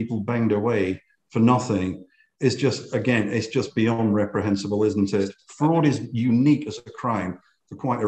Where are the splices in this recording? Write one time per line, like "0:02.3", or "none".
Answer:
0:05.4